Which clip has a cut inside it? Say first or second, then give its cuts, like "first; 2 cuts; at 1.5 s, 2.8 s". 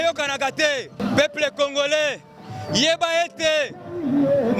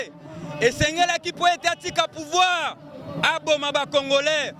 first; 1 cut; at 1.0 s